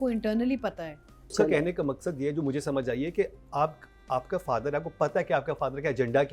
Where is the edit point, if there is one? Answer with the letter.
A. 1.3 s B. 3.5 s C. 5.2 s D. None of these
A